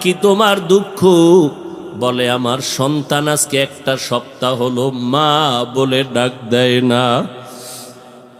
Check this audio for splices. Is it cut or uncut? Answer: uncut